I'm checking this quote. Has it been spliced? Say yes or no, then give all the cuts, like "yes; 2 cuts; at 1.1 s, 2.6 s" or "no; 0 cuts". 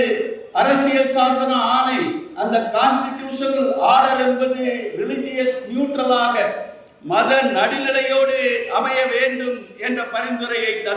no; 0 cuts